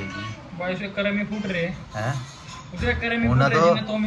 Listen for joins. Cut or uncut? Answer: uncut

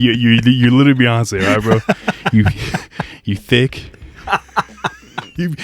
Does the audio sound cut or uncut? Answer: uncut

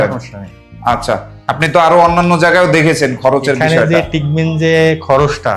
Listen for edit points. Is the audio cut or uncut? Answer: cut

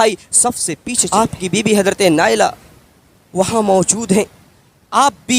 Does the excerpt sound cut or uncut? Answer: cut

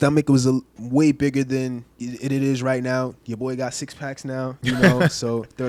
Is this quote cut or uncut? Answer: uncut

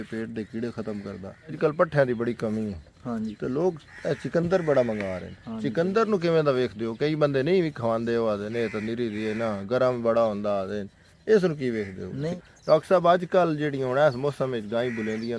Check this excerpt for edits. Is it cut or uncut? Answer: cut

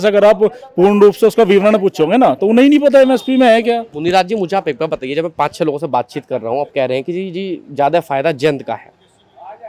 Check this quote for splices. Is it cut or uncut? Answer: uncut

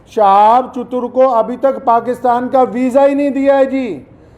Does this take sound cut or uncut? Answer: uncut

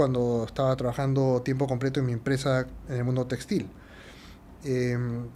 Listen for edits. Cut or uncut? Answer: uncut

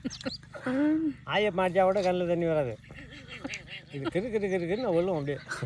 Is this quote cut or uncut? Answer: uncut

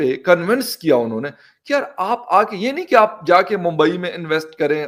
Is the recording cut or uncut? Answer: uncut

